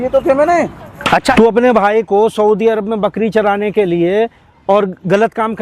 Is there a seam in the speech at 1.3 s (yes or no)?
yes